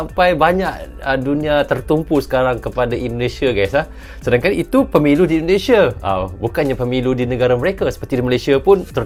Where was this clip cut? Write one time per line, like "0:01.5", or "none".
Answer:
none